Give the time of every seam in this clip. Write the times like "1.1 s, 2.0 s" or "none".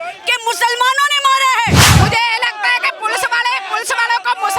1.9 s